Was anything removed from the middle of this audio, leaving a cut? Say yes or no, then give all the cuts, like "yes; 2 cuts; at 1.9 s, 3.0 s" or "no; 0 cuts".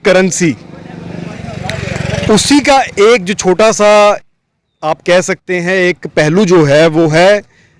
no; 0 cuts